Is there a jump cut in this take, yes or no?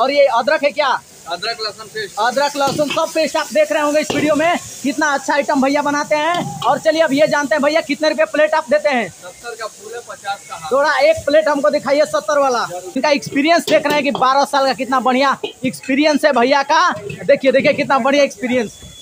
yes